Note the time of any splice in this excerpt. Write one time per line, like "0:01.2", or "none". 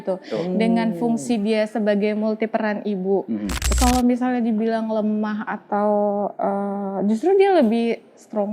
0:03.7